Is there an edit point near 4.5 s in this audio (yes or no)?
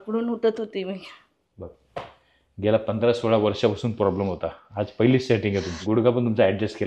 no